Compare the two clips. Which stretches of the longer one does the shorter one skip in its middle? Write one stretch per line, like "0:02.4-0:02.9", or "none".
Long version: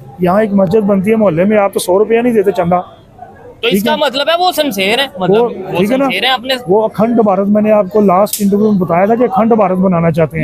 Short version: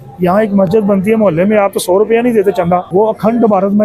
0:02.9-0:06.6

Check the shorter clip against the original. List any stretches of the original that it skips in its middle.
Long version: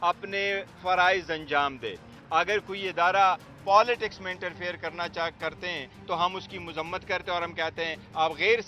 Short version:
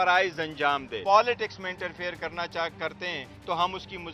0:01.8-0:03.5

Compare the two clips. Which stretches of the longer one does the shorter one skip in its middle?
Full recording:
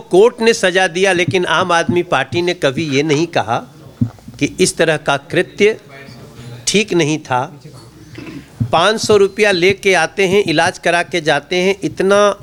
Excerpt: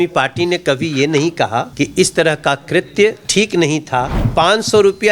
0:03.7-0:04.3
0:05.8-0:06.6
0:07.6-0:08.6

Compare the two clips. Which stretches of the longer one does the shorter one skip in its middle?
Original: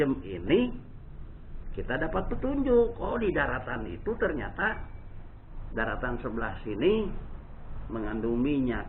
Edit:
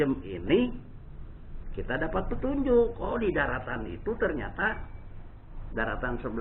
none

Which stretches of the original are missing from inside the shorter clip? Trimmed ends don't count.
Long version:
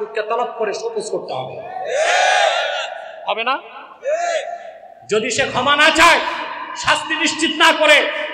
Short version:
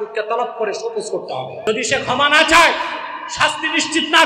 0:01.7-0:05.1

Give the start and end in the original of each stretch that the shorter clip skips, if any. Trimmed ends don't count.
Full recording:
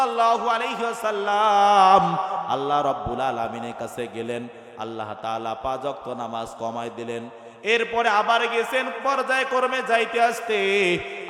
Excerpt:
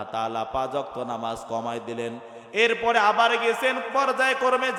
none

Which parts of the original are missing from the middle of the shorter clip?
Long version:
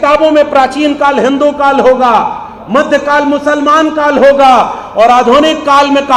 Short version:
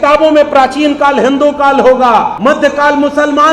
0:02.3-0:02.6

